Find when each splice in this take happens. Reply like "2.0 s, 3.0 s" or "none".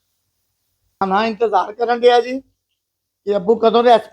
1.0 s